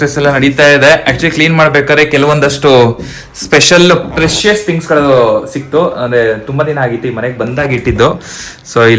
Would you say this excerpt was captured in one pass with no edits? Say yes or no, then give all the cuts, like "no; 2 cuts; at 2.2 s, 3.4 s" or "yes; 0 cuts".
yes; 0 cuts